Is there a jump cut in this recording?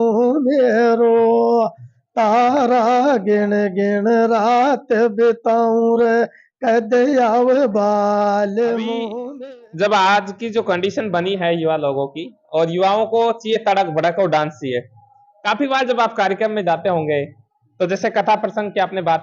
yes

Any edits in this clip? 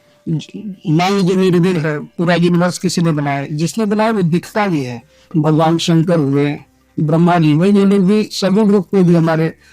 yes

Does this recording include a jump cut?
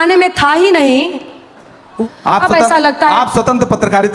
yes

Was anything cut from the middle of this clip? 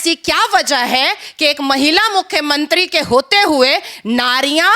no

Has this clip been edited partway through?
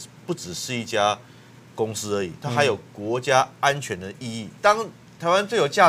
yes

